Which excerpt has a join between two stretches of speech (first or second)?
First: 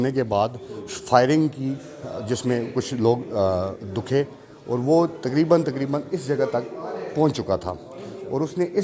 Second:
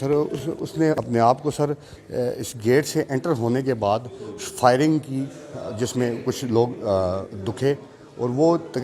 second